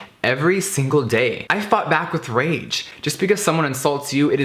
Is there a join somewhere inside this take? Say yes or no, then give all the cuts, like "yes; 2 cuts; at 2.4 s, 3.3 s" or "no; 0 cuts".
yes; 2 cuts; at 1.4 s, 2.9 s